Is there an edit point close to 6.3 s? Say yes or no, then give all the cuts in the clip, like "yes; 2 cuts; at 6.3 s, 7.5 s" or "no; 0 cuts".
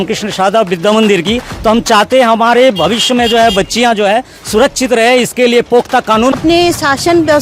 yes; 1 cut; at 6.3 s